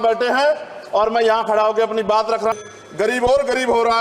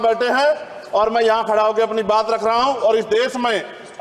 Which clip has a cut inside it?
first; 1 cut; at 2.5 s

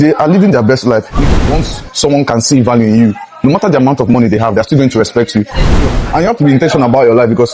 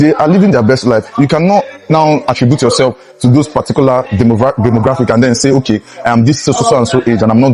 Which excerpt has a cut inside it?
first; 2 cuts; at 1.2 s, 5.8 s

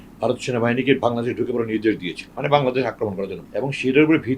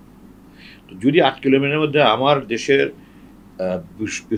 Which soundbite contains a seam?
first; 2 cuts; at 2.3 s, 3.4 s

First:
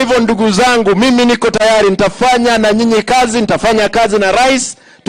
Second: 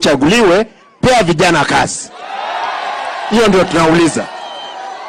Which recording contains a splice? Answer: first; 1 cut; at 1.5 s

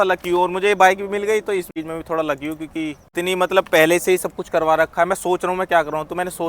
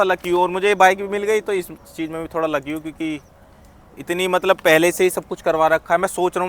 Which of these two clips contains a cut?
first; 2 cuts; at 1.7 s, 3.0 s

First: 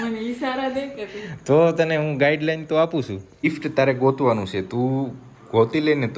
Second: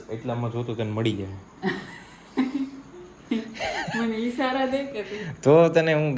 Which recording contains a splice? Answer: first; 1 cut; at 3.4 s

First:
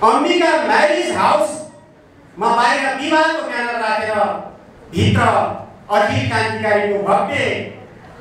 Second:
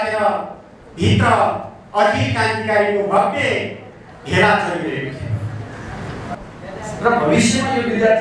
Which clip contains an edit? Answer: second; 1 cut; at 6.4 s

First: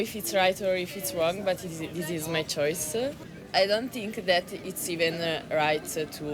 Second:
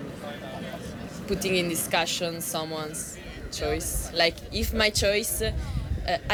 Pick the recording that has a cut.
first; 1 cut; at 3.2 s

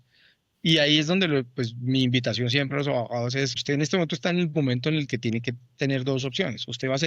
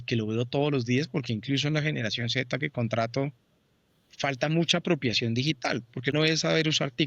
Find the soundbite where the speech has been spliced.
second; 1 cut; at 6.1 s

